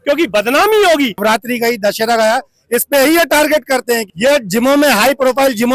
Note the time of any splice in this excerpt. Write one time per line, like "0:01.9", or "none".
0:01.2
0:04.1